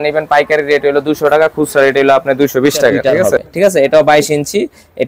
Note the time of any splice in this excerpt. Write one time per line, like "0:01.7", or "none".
0:03.4